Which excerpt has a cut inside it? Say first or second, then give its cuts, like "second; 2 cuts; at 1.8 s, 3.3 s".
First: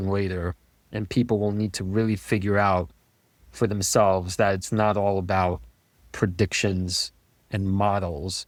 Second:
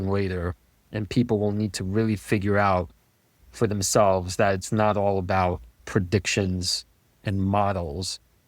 second; 1 cut; at 5.7 s